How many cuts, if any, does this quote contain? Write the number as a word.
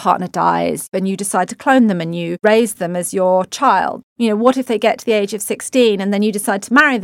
one